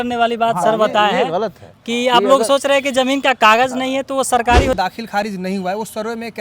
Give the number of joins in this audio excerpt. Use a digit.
1